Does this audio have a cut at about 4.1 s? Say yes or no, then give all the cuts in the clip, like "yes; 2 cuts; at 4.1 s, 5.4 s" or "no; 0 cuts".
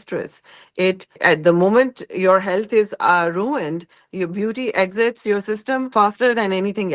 no; 2 cuts; at 1.2 s, 5.9 s